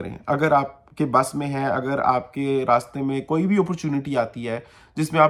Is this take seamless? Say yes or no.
yes